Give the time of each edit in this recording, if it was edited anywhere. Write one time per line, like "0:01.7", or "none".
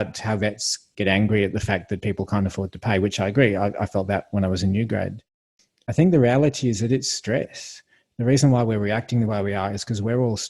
0:05.6